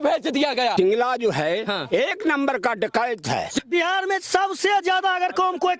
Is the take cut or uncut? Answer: cut